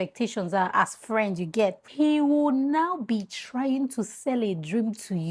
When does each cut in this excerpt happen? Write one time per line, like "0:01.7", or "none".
0:01.8

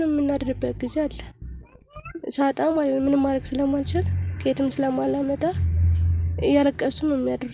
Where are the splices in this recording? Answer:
none

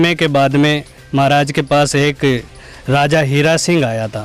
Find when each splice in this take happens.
none

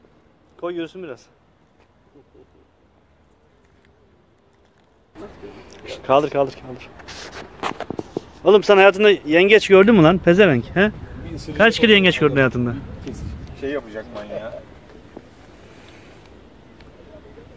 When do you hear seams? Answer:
0:05.1

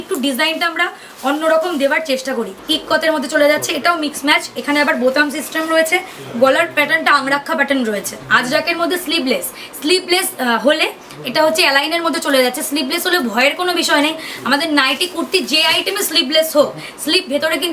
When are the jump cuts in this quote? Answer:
0:02.5
0:08.2

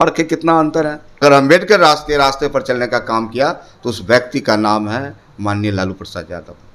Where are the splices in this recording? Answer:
0:01.1

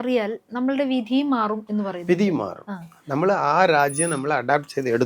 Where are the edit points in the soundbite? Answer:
none

